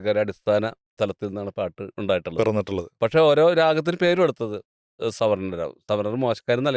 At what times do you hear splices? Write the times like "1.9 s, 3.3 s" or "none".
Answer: none